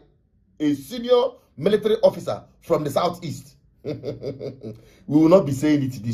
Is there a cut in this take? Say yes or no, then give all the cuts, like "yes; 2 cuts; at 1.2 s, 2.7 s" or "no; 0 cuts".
no; 0 cuts